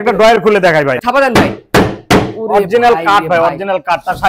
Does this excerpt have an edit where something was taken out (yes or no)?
yes